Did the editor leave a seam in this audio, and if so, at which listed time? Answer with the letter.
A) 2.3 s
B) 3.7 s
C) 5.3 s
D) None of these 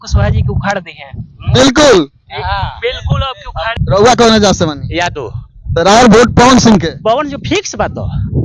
B